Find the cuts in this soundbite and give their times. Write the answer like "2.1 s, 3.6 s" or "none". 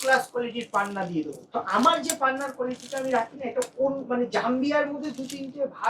1.4 s